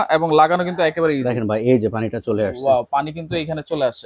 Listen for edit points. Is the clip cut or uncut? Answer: uncut